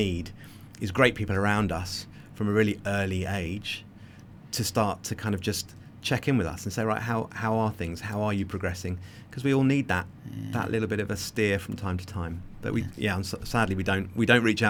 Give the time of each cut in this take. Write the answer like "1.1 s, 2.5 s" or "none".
none